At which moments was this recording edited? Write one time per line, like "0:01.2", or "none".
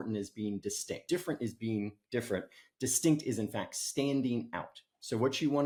none